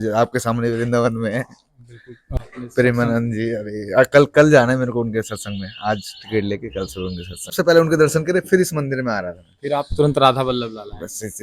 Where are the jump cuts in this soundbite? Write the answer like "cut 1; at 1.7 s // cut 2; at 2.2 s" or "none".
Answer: cut 1; at 2.2 s // cut 2; at 7.5 s